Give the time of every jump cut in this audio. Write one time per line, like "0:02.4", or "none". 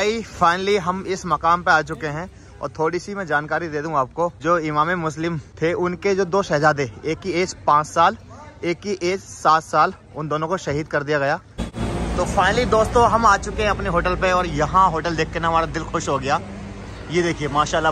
0:04.4
0:05.5
0:12.1